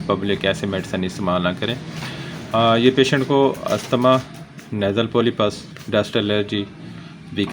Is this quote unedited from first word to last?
yes; 0 cuts

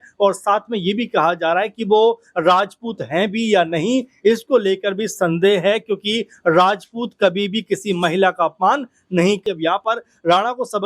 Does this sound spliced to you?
yes; 1 cut; at 9.4 s

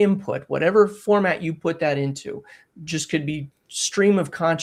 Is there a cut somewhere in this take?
no; 0 cuts

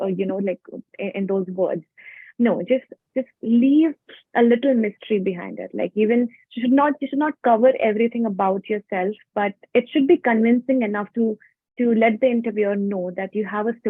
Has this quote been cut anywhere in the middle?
no; 0 cuts

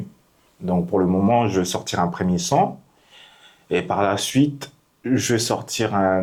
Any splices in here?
no; 0 cuts

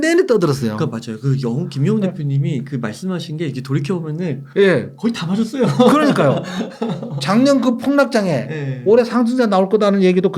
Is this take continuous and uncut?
yes; 0 cuts

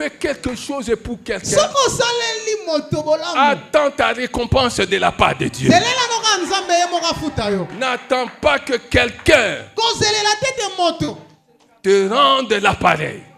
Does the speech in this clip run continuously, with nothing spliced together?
yes; 0 cuts

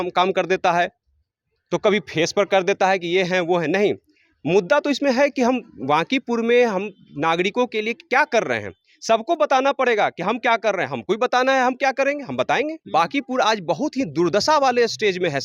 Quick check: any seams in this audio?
yes; 1 cut; at 12.8 s

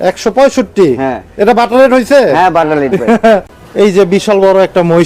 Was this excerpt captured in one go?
no; 1 cut; at 3.6 s

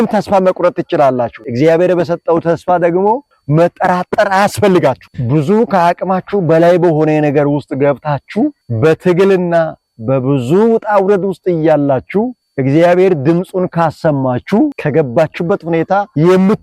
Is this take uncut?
no; 1 cut; at 5.1 s

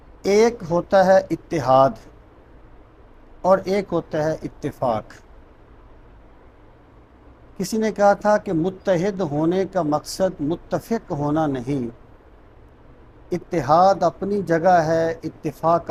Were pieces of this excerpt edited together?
no; 0 cuts

